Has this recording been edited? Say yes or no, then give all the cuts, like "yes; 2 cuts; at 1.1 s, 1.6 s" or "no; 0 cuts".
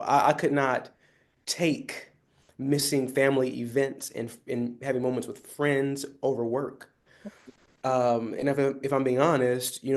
no; 0 cuts